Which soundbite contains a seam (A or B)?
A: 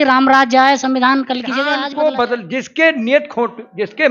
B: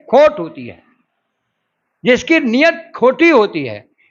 A